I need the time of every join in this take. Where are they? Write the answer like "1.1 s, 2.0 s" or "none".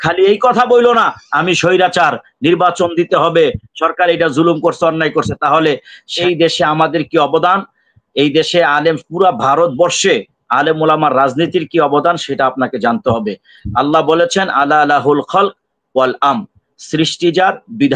6.2 s